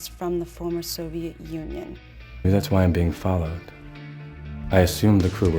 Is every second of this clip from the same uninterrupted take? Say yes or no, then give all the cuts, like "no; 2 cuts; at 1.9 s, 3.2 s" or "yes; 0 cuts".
no; 1 cut; at 2.4 s